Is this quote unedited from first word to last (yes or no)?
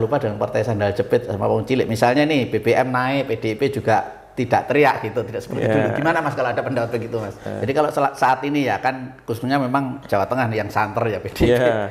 no